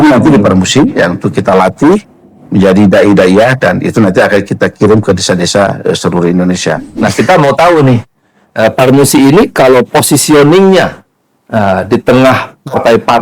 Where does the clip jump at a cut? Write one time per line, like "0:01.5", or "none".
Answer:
0:06.9